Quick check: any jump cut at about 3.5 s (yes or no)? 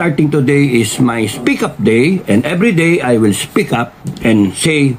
no